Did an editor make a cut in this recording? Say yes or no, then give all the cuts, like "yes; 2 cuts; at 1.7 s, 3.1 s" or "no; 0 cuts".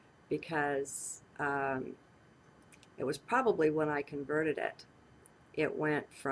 yes; 1 cut; at 3.4 s